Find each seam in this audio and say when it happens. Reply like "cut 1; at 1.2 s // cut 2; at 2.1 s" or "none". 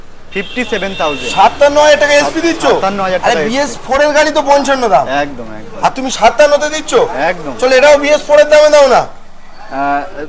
none